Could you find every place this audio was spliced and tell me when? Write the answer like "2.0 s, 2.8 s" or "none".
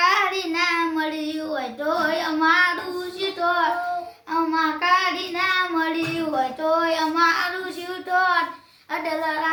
none